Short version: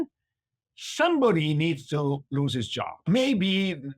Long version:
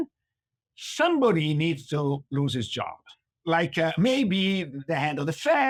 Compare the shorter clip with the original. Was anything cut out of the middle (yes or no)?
yes